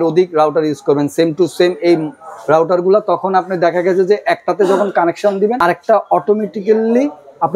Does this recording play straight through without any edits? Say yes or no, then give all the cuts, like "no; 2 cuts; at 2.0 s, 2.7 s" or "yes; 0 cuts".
no; 1 cut; at 5.6 s